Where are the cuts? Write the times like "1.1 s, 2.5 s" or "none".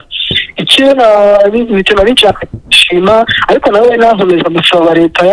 none